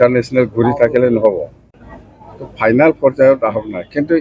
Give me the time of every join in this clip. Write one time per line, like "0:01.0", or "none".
0:01.7